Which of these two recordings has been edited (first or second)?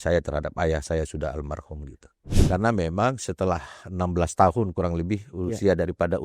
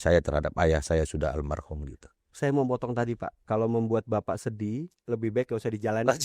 first